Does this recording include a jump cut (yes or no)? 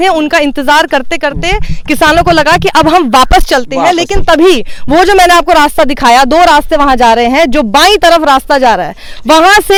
no